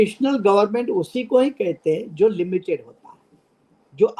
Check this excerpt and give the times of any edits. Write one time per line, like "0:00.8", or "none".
none